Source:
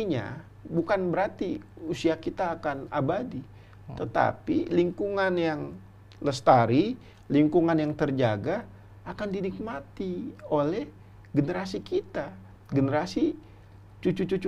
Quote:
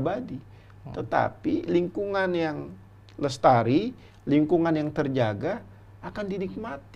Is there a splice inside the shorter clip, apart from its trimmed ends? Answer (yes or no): no